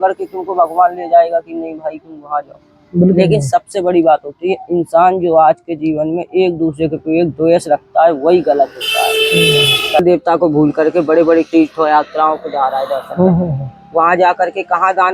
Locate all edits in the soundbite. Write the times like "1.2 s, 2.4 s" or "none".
10.0 s